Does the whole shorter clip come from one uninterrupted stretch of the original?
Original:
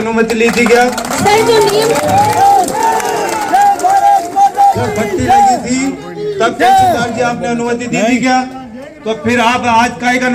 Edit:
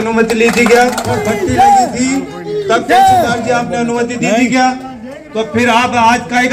no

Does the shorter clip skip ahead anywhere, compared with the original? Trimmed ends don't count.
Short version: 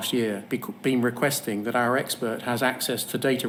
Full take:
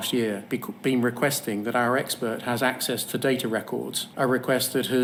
no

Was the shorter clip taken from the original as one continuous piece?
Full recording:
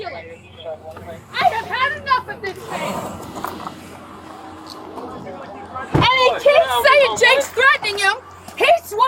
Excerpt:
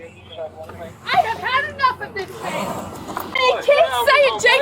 no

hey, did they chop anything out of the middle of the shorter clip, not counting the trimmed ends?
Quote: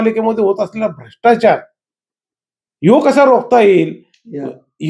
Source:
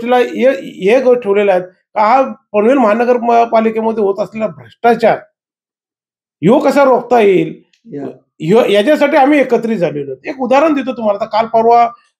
no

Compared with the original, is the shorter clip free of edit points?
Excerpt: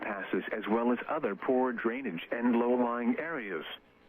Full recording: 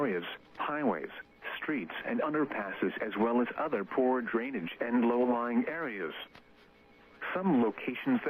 yes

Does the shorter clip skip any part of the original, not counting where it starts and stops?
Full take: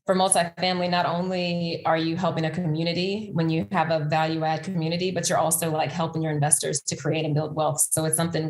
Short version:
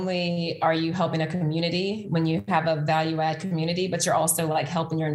no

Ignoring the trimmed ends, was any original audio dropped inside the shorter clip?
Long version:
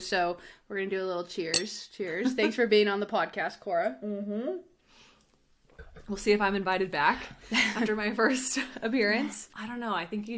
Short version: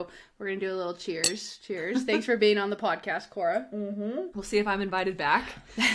yes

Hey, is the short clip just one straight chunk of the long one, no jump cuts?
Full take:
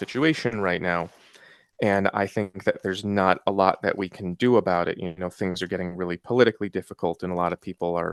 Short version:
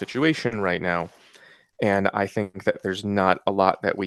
yes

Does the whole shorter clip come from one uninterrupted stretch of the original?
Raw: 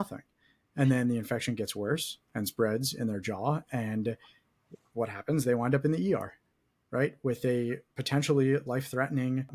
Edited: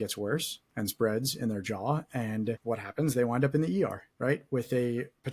no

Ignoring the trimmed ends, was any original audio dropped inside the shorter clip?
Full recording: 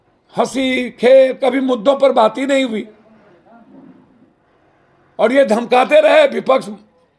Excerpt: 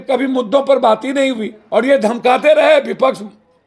yes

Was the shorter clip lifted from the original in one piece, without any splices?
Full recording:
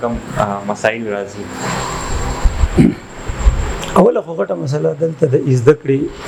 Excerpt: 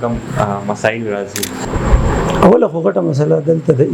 no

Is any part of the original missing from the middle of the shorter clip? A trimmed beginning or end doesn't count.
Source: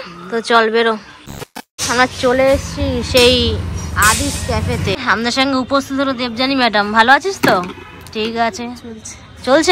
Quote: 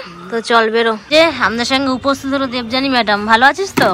yes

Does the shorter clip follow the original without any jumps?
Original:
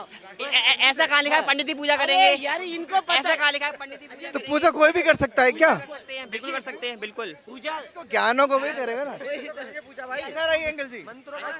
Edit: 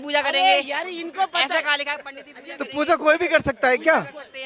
yes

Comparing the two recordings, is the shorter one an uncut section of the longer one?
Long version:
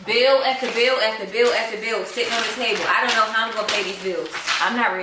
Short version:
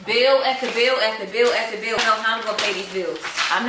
no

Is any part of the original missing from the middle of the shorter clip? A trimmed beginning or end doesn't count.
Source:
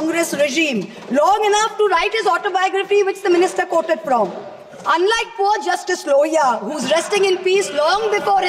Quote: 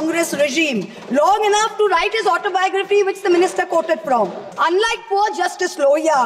yes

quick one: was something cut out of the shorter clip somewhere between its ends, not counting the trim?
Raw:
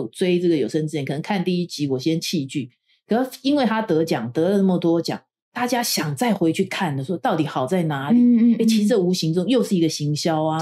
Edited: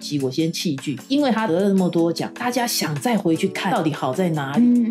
yes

